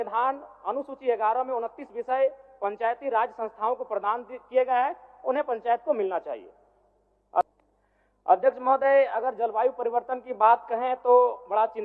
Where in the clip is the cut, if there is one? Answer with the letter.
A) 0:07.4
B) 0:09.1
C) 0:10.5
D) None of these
A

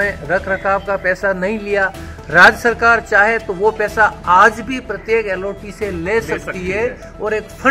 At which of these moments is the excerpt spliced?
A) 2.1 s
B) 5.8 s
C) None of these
C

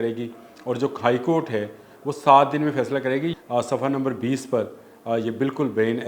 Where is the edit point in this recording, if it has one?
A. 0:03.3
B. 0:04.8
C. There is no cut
A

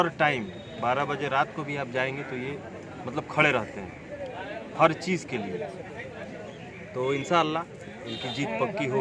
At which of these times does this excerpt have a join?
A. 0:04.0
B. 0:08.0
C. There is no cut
C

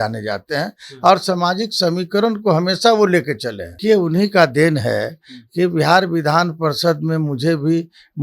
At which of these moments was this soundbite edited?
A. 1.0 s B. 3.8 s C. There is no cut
B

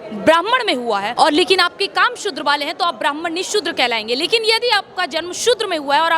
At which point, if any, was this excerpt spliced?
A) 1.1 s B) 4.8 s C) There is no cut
A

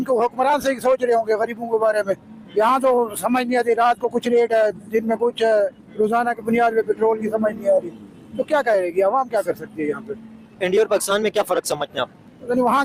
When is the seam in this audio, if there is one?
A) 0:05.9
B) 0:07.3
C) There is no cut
C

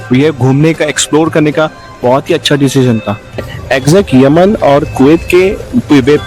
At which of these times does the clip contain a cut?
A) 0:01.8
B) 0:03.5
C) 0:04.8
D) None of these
B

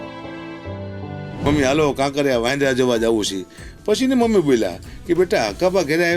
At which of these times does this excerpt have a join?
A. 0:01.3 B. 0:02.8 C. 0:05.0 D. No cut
A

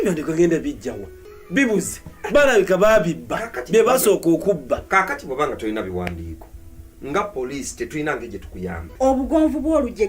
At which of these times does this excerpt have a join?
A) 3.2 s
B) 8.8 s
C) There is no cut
B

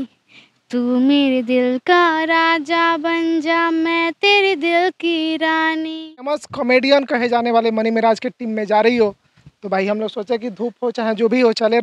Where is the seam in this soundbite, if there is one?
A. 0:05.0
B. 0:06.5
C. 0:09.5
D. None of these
B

